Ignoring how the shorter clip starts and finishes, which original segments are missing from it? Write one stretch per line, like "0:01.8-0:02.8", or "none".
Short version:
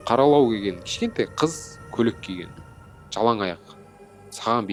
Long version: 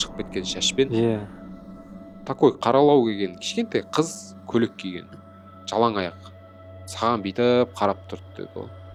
none

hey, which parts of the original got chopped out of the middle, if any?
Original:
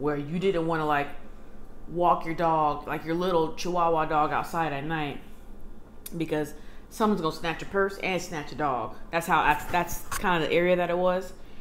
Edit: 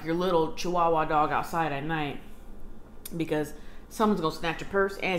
none

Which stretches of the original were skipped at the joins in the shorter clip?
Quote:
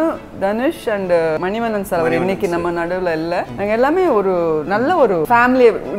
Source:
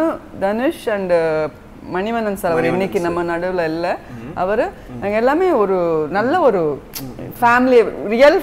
0:01.4-0:01.9
0:04.0-0:05.0
0:06.7-0:07.4

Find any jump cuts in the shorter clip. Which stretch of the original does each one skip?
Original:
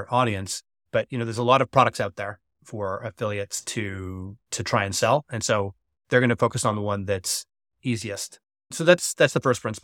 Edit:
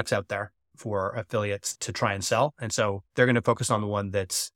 0:03.6-0:04.4
0:05.7-0:06.0

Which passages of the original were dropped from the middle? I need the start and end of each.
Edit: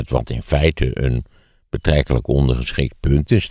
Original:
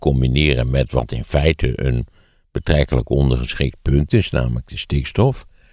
none

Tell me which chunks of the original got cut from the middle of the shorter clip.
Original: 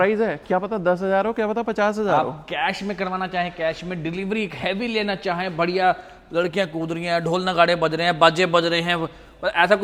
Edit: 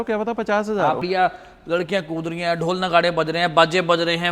0:02.3-0:05.7

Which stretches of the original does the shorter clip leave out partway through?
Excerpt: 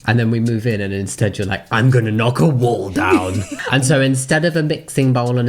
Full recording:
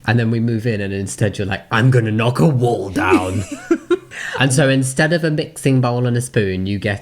0:03.5-0:04.2

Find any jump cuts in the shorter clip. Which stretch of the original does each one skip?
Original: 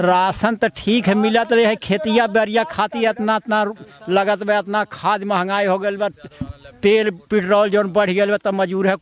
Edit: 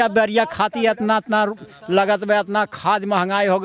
none

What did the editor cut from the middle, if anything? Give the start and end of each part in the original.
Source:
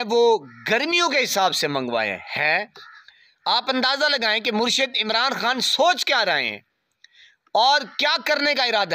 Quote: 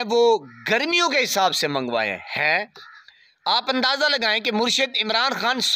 none

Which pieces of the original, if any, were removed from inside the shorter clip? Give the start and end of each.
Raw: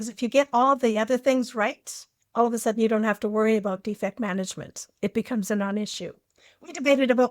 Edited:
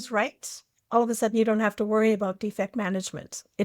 none

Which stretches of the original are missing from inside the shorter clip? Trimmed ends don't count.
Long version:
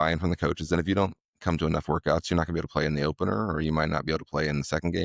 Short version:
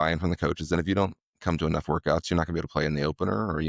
none

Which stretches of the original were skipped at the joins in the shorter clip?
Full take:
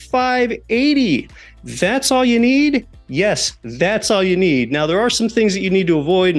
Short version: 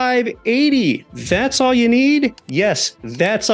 0:01.4-0:01.6
0:02.9-0:03.0

